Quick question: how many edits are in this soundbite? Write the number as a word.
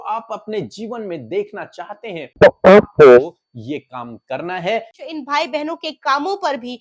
two